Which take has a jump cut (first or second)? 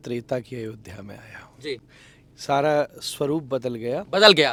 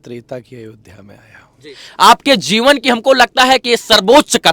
second